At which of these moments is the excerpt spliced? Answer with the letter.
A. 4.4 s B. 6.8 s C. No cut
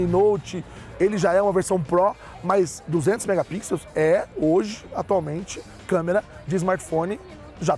C